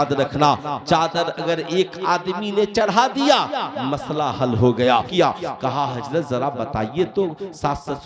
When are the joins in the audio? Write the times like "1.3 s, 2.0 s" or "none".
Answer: 5.1 s